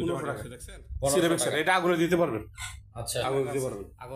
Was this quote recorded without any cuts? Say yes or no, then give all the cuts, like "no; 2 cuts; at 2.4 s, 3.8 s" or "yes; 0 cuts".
yes; 0 cuts